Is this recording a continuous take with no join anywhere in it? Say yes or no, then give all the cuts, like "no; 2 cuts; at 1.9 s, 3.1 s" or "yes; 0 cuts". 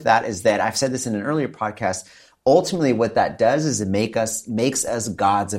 yes; 0 cuts